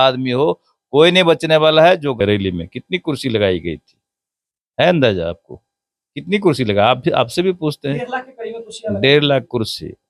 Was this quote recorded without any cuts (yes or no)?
no